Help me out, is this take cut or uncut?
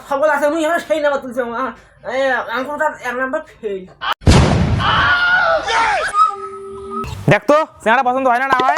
cut